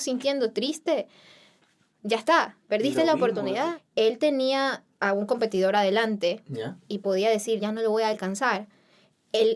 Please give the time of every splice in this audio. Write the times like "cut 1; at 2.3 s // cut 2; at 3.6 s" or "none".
cut 1; at 3.7 s // cut 2; at 7.6 s